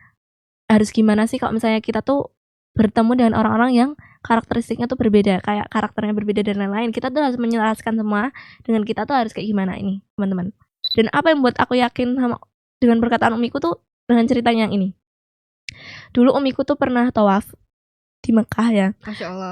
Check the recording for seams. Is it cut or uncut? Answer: cut